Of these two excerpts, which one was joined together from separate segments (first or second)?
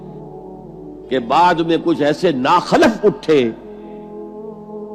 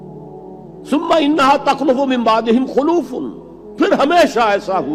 first